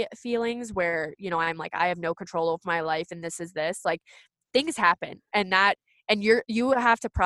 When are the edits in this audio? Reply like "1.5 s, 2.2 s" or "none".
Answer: none